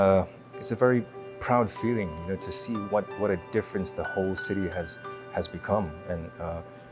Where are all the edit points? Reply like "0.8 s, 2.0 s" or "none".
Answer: none